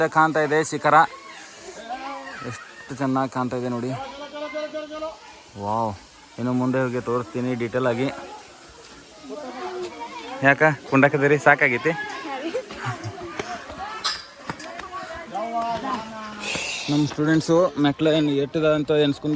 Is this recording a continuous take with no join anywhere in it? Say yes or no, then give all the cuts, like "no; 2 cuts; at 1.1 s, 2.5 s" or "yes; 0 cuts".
yes; 0 cuts